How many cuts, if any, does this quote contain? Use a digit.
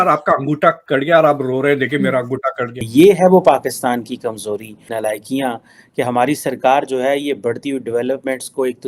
1